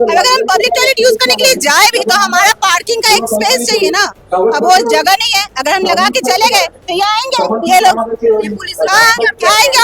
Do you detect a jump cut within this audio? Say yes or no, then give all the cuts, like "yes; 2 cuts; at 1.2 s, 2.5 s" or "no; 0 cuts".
no; 0 cuts